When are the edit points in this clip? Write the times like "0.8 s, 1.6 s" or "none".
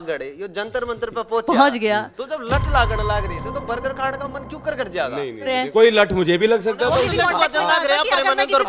5.6 s, 7.1 s